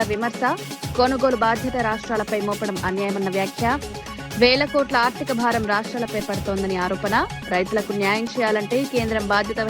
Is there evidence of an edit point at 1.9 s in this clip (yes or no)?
no